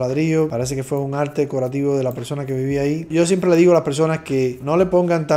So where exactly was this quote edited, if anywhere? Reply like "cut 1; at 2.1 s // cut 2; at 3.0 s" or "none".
none